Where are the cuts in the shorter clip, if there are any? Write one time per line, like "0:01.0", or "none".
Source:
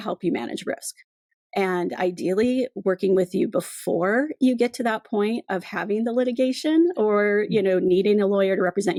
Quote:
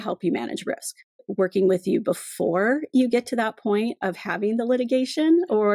0:01.3